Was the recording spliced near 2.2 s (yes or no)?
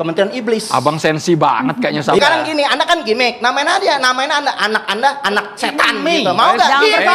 yes